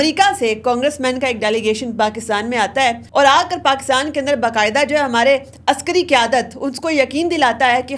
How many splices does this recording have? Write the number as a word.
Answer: one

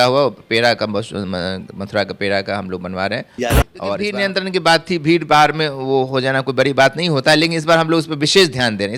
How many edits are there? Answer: one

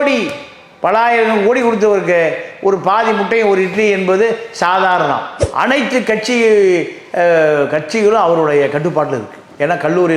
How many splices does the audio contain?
one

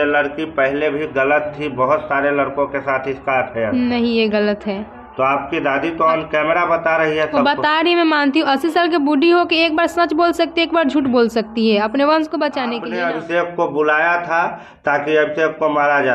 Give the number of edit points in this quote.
one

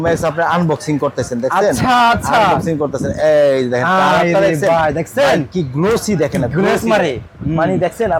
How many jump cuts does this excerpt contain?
zero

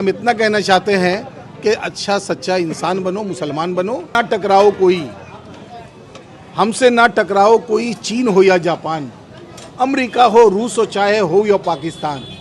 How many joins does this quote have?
one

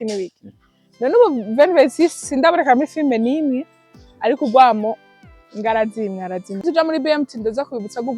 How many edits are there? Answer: one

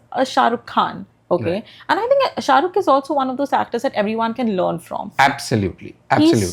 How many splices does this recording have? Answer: zero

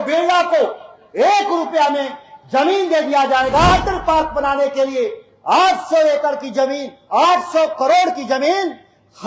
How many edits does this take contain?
one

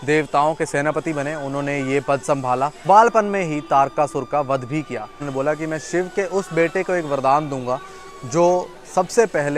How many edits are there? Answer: two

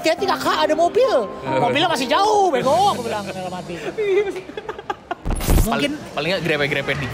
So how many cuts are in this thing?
one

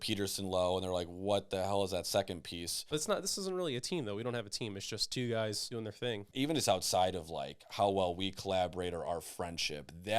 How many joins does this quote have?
two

